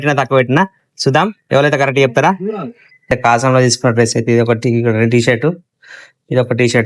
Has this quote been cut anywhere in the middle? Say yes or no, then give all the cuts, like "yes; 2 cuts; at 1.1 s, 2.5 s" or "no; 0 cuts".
yes; 1 cut; at 3.1 s